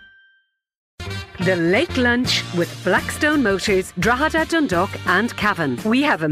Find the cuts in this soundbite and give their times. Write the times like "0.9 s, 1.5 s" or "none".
0.9 s